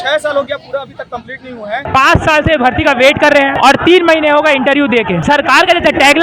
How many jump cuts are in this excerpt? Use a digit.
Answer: 3